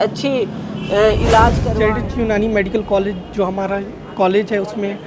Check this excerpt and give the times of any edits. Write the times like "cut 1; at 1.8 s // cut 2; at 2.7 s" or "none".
cut 1; at 1.7 s